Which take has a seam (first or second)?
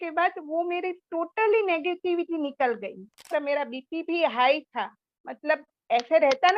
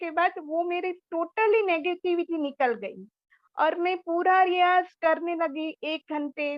first